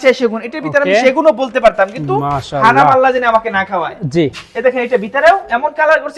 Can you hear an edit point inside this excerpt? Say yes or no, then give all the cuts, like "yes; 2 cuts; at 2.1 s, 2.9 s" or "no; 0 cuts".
no; 0 cuts